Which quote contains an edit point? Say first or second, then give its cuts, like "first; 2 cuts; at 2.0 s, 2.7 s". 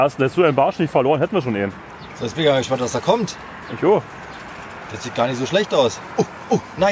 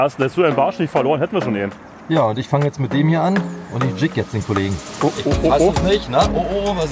second; 2 cuts; at 1.9 s, 5.0 s